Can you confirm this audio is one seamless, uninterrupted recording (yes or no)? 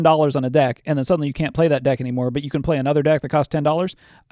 yes